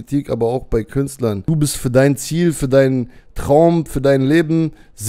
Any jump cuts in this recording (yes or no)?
yes